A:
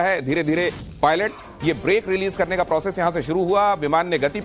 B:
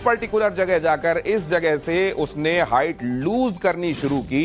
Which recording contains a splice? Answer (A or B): B